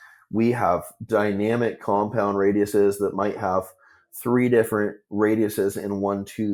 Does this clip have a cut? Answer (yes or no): no